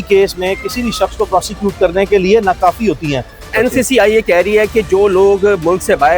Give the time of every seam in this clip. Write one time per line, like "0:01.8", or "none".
0:03.5